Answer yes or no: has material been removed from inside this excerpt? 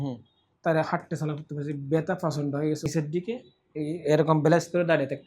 yes